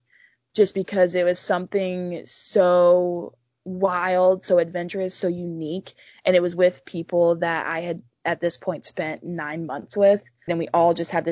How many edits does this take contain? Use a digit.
1